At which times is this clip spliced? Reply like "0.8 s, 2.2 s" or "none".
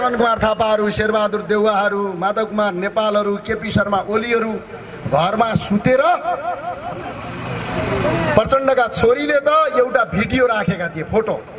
none